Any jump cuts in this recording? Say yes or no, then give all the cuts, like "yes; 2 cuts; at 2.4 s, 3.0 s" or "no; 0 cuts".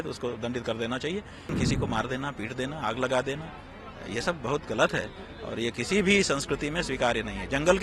yes; 1 cut; at 1.6 s